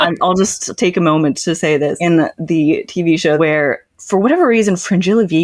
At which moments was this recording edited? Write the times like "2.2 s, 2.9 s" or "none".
1.8 s, 3.4 s